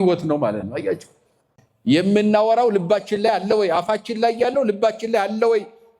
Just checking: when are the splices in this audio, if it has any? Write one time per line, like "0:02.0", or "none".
0:01.5